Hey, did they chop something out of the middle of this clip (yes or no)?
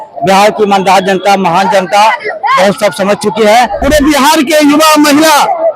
yes